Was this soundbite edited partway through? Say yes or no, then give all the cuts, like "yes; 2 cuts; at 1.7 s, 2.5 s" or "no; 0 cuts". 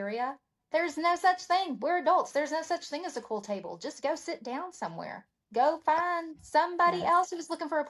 no; 0 cuts